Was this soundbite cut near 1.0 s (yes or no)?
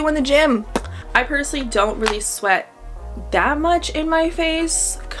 yes